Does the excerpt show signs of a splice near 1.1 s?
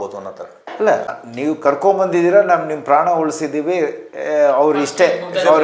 yes; 1 cut; at 1.1 s

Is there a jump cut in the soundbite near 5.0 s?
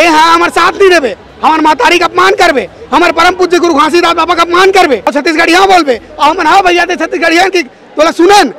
yes; 1 cut; at 5.0 s

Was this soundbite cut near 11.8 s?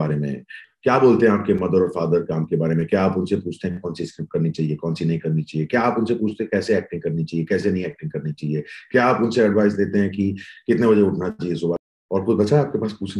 yes; 1 cut; at 11.8 s

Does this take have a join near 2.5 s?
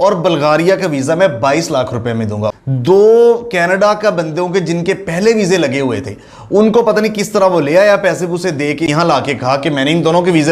yes; 2 cuts; at 2.5 s, 8.9 s

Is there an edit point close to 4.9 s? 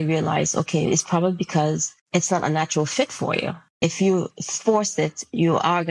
no; 2 cuts; at 1.9 s, 3.6 s

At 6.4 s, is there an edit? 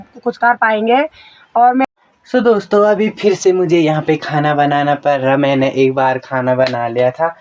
no; 1 cut; at 1.9 s

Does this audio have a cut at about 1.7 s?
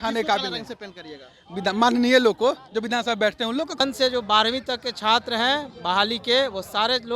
no; 1 cut; at 3.8 s

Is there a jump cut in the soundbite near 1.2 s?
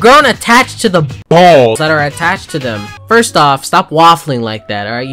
no; 1 cut; at 2.9 s

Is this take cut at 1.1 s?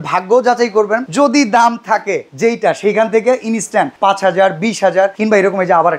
yes; 4 cuts; at 1.1 s, 2.2 s, 3.9 s, 5.2 s

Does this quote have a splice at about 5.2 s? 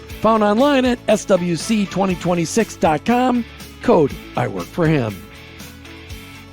yes; 1 cut; at 5.2 s

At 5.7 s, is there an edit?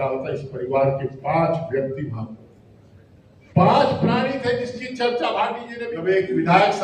yes; 1 cut; at 5.7 s

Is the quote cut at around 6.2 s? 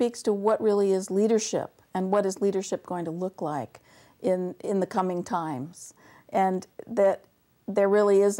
no; 0 cuts

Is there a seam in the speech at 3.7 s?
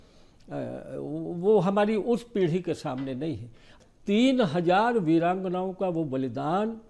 yes; 1 cut; at 3.7 s

